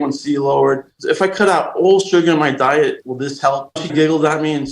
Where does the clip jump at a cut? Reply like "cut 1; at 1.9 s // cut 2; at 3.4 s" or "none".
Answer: cut 1; at 0.9 s // cut 2; at 3.7 s